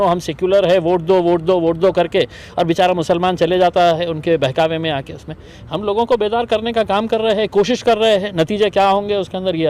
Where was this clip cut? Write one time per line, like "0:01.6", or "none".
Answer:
none